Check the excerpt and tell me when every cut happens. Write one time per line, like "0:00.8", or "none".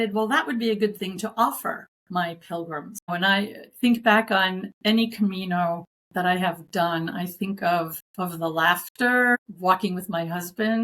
0:01.9
0:03.1
0:04.7
0:05.9
0:08.0
0:09.4